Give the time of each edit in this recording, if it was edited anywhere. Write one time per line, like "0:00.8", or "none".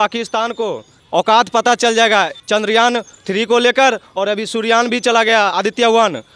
0:00.9
0:02.4
0:03.2